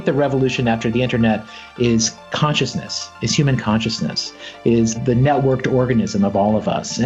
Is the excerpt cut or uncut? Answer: cut